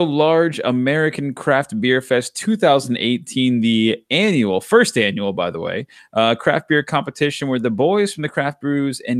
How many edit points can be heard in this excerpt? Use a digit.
0